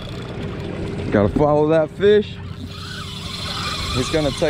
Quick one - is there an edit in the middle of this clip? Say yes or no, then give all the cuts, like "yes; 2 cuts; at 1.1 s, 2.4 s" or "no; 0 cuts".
no; 0 cuts